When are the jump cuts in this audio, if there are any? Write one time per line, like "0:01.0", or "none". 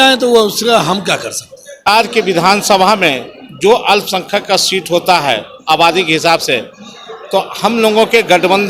0:01.9